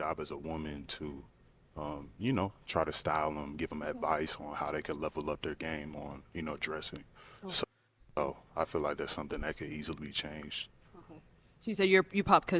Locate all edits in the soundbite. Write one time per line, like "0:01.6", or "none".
0:08.2